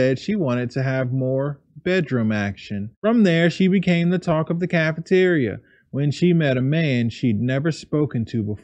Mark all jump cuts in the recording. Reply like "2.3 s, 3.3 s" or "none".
2.9 s